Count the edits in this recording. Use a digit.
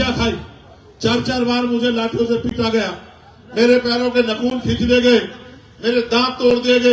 0